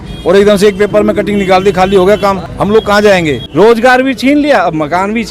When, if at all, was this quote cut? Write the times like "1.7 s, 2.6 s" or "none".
3.4 s